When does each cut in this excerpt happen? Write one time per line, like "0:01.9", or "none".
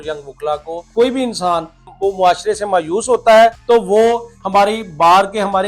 0:00.9
0:01.9
0:03.6